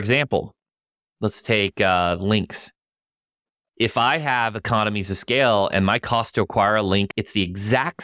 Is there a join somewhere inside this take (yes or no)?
yes